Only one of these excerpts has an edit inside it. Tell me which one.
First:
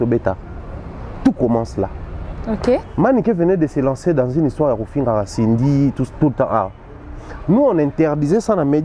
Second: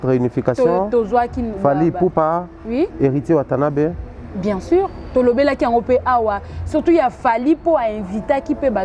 first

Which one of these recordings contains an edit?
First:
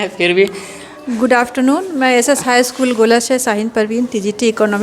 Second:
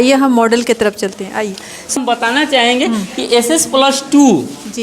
second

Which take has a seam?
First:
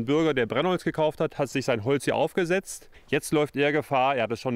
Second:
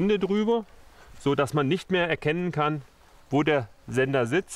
first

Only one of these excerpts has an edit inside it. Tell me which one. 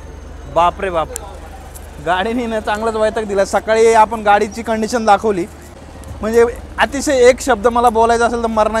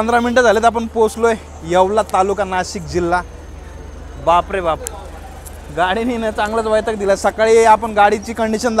first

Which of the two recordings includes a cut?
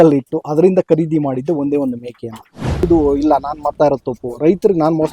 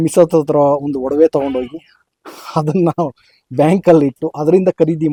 first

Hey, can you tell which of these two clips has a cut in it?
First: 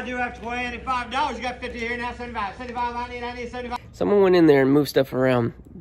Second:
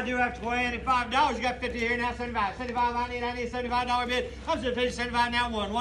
first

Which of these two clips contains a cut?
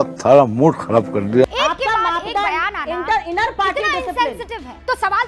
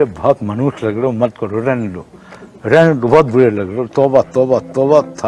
first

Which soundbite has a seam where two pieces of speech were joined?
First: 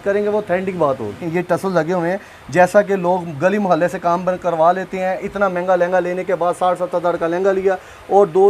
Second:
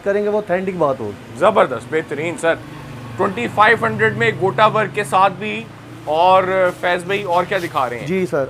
first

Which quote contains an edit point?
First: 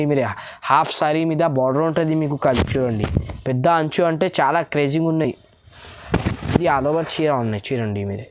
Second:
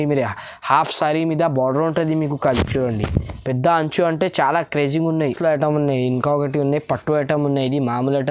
second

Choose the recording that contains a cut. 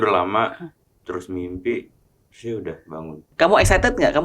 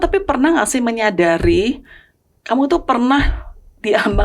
first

